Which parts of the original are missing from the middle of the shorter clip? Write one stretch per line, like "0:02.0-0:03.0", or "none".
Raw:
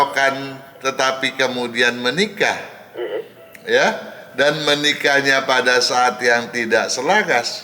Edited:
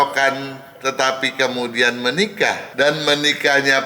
0:02.7-0:04.3